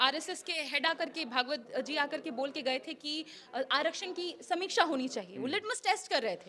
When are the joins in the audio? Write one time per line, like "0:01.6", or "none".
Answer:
none